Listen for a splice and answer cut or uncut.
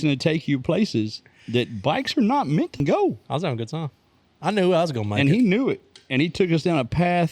cut